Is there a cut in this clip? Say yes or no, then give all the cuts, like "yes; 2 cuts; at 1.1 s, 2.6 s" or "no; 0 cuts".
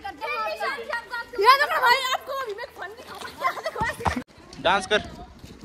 yes; 1 cut; at 4.2 s